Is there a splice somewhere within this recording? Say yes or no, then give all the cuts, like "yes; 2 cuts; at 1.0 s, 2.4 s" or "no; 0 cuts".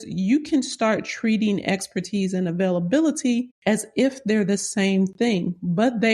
yes; 1 cut; at 3.5 s